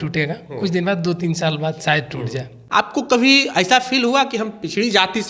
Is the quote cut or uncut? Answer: cut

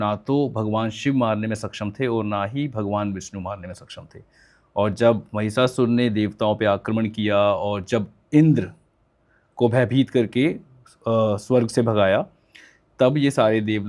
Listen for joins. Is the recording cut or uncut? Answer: uncut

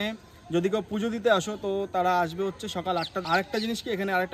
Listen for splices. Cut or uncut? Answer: cut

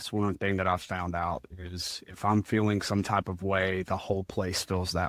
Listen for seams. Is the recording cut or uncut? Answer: uncut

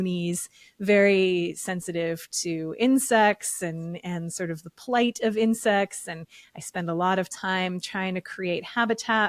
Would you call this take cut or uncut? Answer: uncut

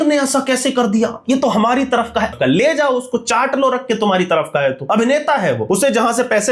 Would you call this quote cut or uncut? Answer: cut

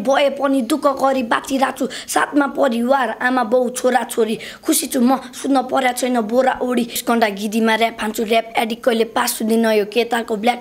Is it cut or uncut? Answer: cut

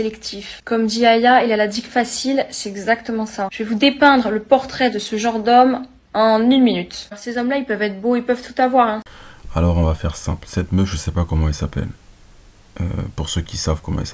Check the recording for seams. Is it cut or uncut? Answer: uncut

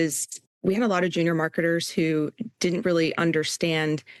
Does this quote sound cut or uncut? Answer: uncut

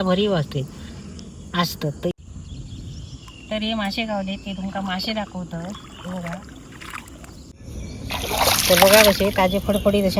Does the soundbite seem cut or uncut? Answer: cut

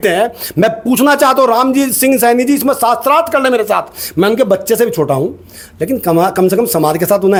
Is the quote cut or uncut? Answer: uncut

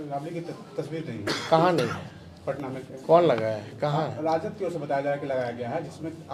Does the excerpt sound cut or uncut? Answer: uncut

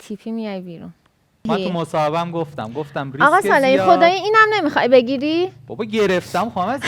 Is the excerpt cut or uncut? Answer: cut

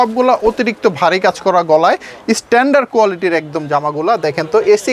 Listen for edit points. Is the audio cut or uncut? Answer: uncut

